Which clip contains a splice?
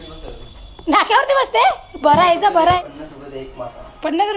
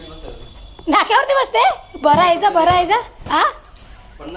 first; 1 cut; at 2.8 s

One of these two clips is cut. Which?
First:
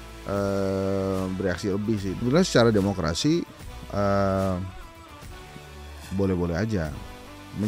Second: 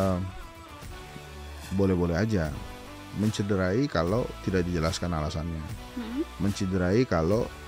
first; 1 cut; at 2.2 s

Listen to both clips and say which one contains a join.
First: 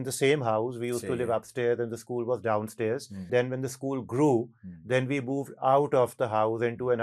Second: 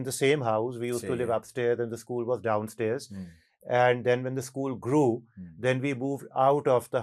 first; 1 cut; at 3.3 s

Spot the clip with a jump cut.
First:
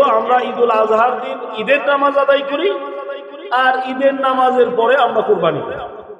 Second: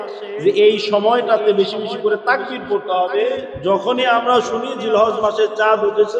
second; 1 cut; at 3.5 s

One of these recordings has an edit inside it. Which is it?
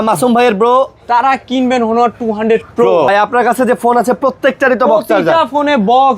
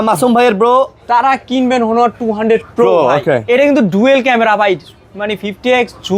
first; 1 cut; at 3.1 s

